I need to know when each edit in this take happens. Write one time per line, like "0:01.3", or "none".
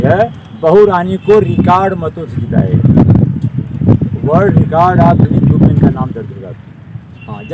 none